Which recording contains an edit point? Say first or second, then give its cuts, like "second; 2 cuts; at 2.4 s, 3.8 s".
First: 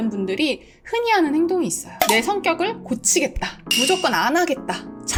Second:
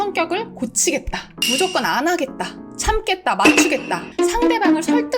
second; 1 cut; at 4.1 s